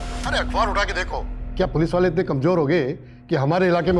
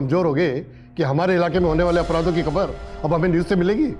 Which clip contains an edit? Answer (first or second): first